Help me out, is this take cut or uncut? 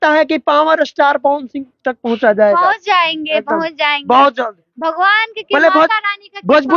uncut